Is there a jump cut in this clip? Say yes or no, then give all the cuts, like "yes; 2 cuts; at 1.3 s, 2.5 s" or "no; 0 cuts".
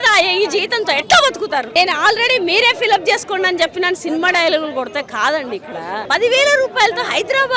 yes; 2 cuts; at 1.7 s, 6.0 s